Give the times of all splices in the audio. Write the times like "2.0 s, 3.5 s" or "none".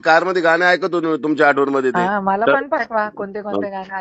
2.0 s